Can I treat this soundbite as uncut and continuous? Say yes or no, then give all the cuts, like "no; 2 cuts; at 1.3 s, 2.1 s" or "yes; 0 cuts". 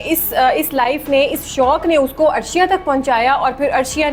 yes; 0 cuts